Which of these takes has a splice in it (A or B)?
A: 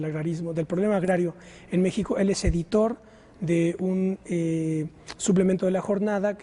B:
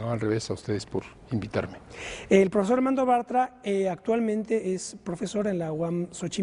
B